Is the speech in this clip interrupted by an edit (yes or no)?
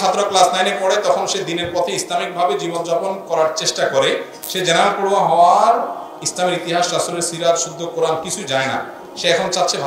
no